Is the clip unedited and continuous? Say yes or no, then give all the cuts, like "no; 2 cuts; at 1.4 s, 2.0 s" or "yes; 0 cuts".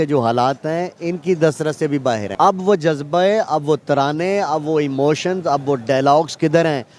no; 2 cuts; at 2.3 s, 3.7 s